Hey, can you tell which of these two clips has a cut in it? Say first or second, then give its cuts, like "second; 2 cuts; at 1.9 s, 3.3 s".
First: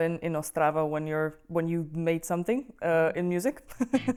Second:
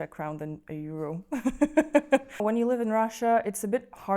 second; 1 cut; at 2.4 s